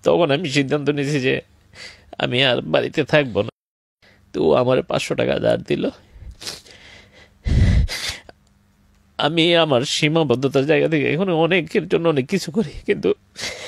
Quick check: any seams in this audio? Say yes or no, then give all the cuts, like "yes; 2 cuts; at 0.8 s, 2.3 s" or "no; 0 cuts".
yes; 1 cut; at 3.6 s